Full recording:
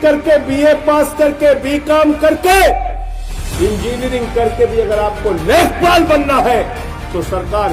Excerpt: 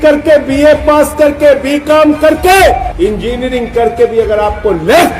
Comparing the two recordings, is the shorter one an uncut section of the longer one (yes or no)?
no